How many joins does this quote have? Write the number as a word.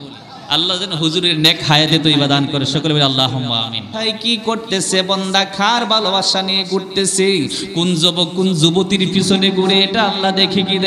one